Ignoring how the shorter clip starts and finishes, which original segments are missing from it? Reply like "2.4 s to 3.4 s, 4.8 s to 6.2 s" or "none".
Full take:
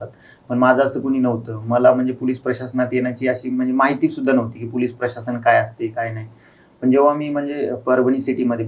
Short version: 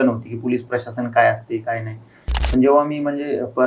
none